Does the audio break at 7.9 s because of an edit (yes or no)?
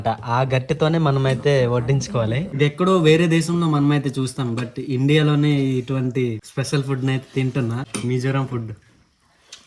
yes